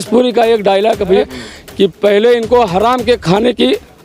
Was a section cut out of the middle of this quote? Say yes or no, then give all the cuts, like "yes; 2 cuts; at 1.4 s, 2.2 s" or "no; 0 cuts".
yes; 1 cut; at 1.2 s